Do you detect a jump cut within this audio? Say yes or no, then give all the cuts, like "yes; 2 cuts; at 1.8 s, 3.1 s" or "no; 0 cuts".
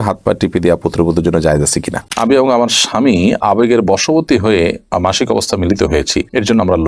yes; 1 cut; at 2.2 s